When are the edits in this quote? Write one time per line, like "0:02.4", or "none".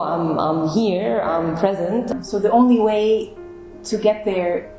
0:02.1

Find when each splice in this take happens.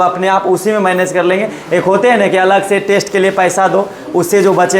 none

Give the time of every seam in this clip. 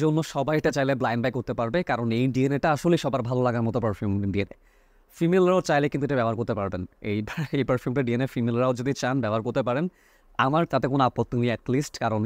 none

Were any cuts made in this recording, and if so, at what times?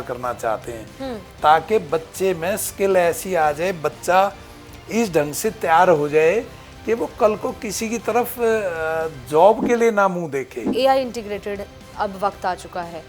0:10.6

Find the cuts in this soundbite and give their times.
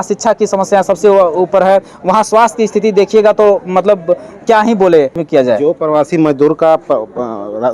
0:05.2

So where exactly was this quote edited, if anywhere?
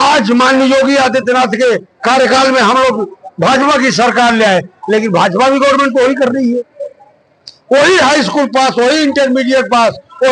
none

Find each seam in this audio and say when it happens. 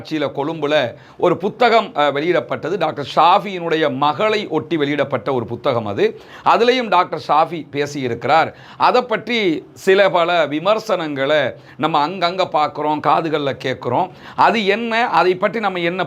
none

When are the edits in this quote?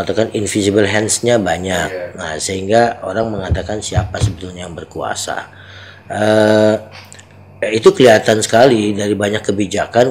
none

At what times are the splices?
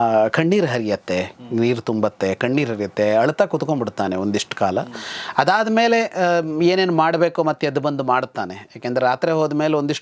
none

